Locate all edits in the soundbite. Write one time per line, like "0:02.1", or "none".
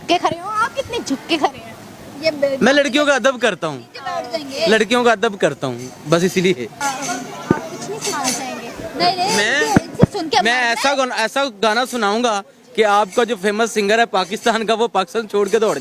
none